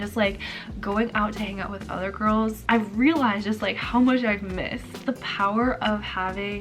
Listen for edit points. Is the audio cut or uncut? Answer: cut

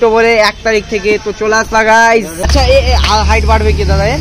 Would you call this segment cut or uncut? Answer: cut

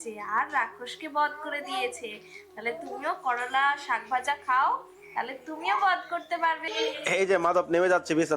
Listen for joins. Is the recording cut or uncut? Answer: cut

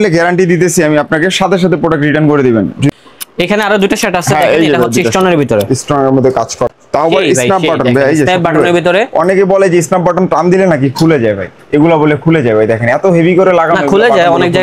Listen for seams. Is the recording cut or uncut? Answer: cut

